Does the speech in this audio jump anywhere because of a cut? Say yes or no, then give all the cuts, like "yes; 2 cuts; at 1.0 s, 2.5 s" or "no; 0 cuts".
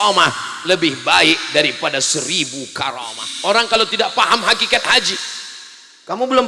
yes; 1 cut; at 3.1 s